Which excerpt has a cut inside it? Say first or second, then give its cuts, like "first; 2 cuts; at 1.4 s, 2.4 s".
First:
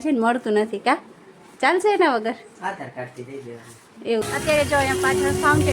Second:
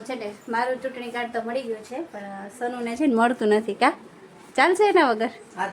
first; 1 cut; at 4.3 s